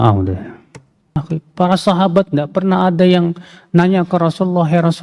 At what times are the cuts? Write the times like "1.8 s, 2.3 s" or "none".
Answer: 1.2 s